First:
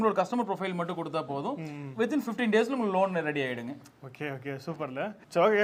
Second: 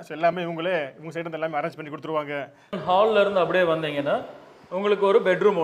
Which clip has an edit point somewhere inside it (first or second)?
second